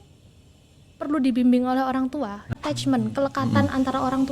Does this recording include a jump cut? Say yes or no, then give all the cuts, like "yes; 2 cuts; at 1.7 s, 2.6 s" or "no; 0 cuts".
yes; 1 cut; at 2.4 s